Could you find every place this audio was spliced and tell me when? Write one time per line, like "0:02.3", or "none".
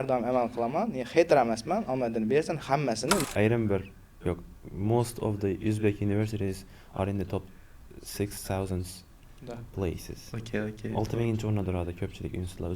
0:03.2